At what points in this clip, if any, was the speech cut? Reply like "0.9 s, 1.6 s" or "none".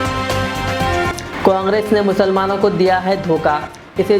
1.2 s